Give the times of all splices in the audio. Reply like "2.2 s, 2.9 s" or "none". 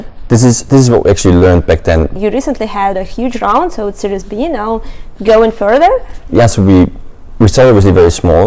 2.2 s, 6.1 s